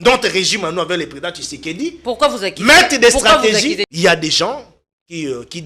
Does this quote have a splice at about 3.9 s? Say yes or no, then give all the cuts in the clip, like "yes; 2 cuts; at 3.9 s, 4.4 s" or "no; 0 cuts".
yes; 1 cut; at 3.9 s